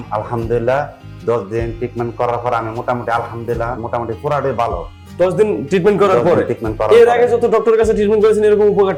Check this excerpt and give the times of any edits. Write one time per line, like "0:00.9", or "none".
none